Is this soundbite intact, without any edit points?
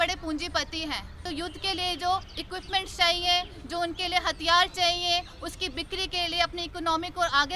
no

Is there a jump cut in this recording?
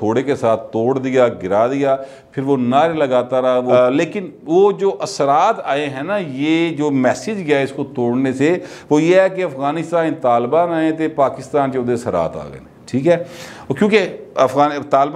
no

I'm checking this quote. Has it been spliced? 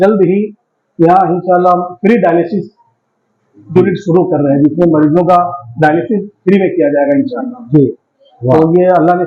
no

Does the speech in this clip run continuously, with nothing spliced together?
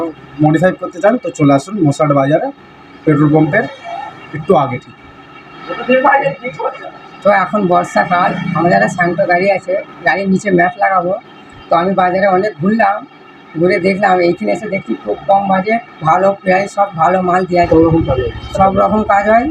yes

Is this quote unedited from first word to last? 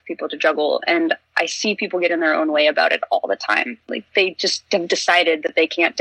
yes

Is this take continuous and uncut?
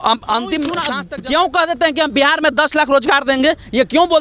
no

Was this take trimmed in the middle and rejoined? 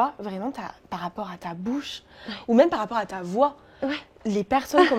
no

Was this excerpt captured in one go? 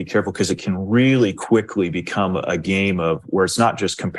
yes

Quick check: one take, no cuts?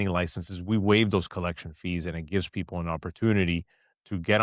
yes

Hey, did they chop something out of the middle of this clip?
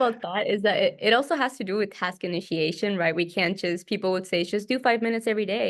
no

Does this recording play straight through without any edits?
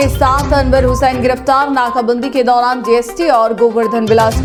yes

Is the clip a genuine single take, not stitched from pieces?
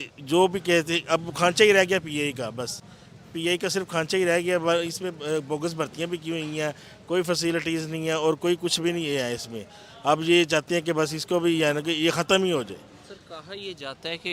yes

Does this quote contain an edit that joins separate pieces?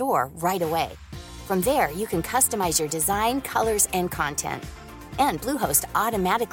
no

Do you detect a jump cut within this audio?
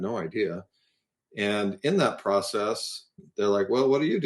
yes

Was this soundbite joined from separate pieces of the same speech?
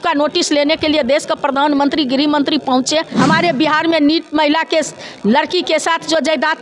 yes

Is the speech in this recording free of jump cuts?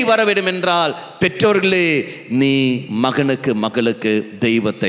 yes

